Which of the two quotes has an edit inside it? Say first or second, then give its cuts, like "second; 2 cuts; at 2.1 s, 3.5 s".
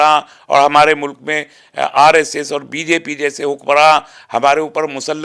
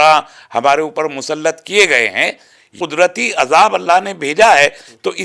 second; 1 cut; at 2.8 s